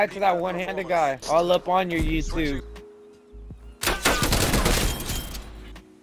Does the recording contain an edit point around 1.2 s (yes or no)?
no